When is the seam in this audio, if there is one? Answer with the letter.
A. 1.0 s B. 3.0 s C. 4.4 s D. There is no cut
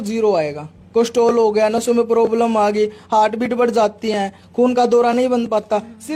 D